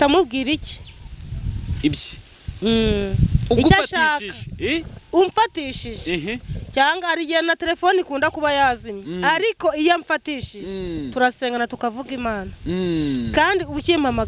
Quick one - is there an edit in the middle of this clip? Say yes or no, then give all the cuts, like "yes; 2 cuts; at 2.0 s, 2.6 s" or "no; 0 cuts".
no; 0 cuts